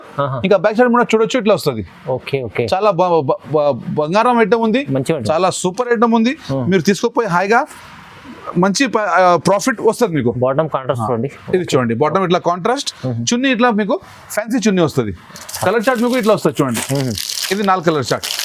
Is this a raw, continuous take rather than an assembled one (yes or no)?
yes